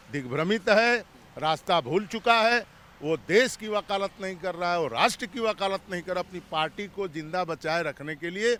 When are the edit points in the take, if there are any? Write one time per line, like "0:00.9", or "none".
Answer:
none